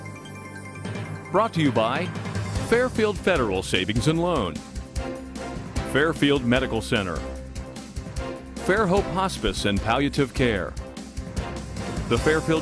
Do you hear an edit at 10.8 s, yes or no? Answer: yes